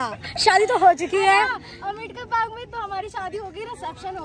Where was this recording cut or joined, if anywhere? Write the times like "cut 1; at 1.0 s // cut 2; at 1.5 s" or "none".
none

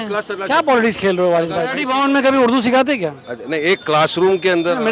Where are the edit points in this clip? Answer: cut 1; at 1.8 s

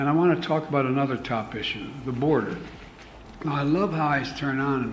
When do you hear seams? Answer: none

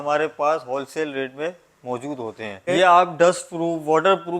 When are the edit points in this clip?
cut 1; at 2.7 s

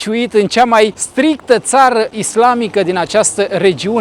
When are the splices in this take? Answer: cut 1; at 1.0 s // cut 2; at 2.2 s

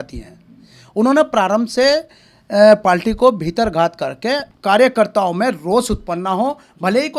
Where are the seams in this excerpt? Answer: cut 1; at 4.5 s

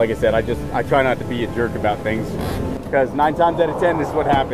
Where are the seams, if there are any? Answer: none

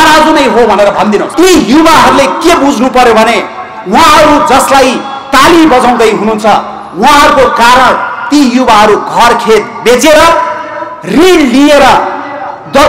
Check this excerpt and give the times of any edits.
cut 1; at 1.3 s

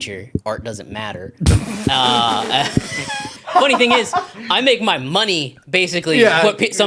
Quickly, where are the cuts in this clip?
cut 1; at 3.4 s

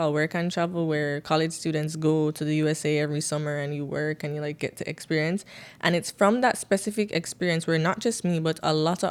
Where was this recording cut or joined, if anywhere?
none

